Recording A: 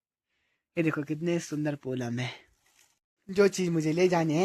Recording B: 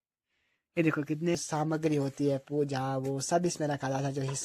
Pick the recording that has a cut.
B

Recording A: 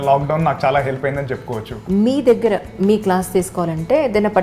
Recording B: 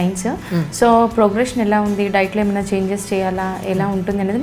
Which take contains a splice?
A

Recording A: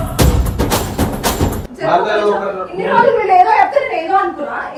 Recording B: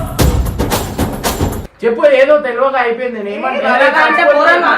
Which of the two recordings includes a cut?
B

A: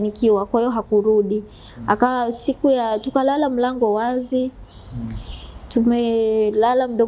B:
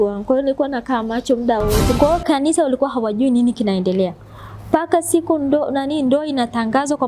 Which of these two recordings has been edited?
B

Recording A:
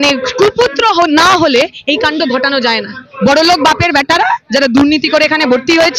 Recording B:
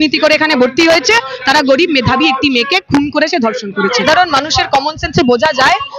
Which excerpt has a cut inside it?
B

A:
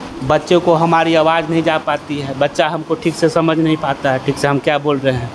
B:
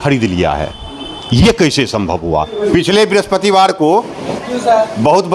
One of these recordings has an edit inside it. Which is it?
B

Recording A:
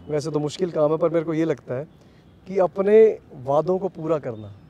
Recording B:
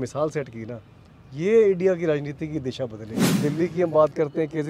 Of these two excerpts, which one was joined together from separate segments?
B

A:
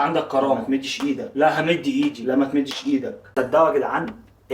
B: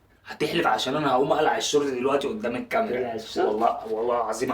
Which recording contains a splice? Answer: A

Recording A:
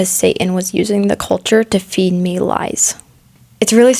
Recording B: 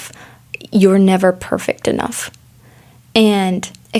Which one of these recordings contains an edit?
A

